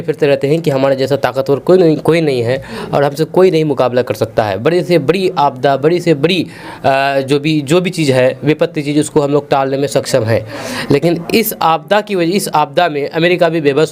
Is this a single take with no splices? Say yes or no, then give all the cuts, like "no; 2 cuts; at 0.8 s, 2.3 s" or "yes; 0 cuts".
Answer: yes; 0 cuts